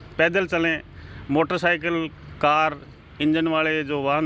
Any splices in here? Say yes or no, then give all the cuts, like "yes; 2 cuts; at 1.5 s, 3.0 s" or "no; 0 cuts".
no; 0 cuts